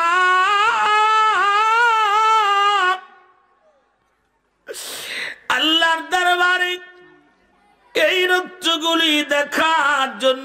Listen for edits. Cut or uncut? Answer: uncut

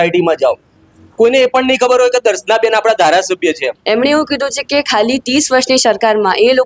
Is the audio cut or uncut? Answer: cut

